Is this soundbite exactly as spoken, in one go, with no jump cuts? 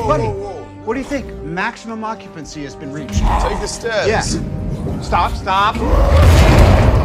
yes; 0 cuts

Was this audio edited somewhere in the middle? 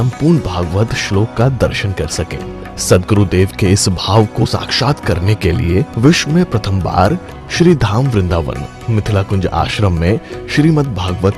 yes; 1 cut; at 4.4 s

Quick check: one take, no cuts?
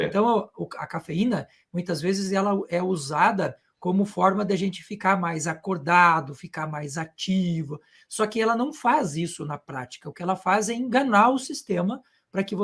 yes; 0 cuts

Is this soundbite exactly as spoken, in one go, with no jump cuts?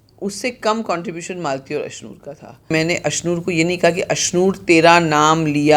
no; 1 cut; at 2.7 s

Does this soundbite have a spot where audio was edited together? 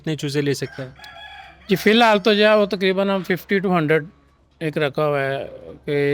no; 0 cuts

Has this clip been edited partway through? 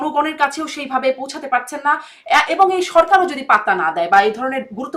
no; 0 cuts

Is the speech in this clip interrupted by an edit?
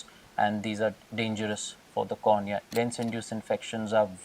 yes; 2 cuts; at 1.0 s, 2.7 s

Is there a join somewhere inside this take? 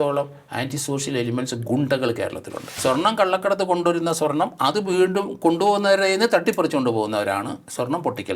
yes; 1 cut; at 2.6 s

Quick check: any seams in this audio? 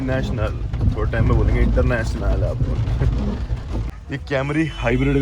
yes; 1 cut; at 3.8 s

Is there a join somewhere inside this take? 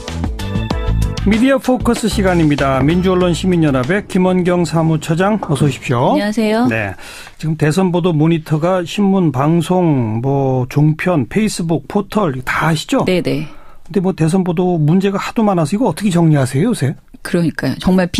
no; 0 cuts

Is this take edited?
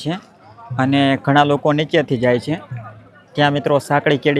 no; 0 cuts

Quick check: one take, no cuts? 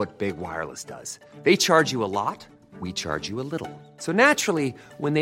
yes; 0 cuts

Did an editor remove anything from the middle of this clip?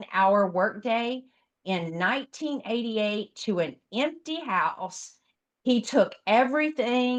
no; 0 cuts

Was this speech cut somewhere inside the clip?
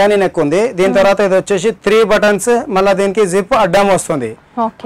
no; 0 cuts

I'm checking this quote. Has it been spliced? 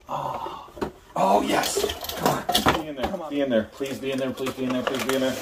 yes; 1 cut; at 3.0 s

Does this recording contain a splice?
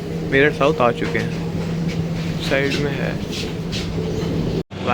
no; 0 cuts

